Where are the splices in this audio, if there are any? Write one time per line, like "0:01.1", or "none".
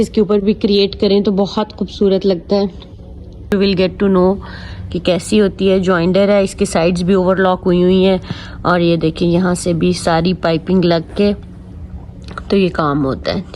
0:03.5